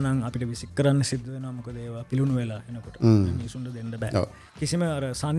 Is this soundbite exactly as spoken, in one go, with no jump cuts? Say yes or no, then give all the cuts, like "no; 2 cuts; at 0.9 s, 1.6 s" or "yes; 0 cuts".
yes; 0 cuts